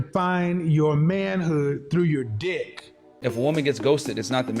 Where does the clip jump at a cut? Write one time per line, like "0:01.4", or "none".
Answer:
0:03.1